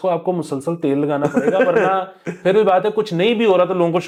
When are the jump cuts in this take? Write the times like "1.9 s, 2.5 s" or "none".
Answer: none